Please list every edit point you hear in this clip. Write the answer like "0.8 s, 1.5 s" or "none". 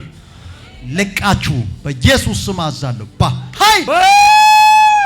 3.8 s